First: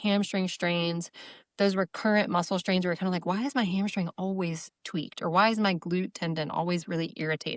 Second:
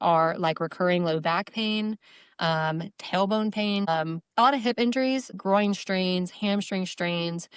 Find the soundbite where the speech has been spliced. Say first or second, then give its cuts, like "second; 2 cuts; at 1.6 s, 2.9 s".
second; 2 cuts; at 3.9 s, 5.3 s